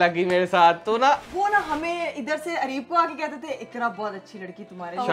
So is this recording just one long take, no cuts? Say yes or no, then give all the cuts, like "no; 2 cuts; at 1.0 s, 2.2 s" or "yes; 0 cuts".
no; 1 cut; at 1.3 s